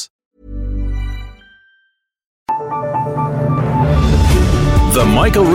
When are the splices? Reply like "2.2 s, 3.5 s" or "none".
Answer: 2.4 s